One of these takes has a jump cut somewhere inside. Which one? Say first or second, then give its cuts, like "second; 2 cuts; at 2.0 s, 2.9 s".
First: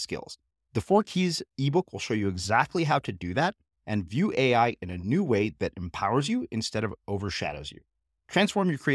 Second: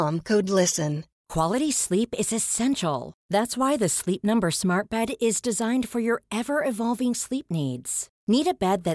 second; 1 cut; at 1.2 s